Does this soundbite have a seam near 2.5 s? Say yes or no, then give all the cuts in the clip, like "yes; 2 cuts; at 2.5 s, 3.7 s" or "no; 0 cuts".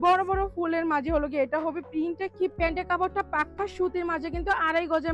yes; 1 cut; at 2.5 s